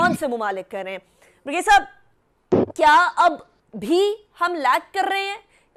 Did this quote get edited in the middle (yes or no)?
no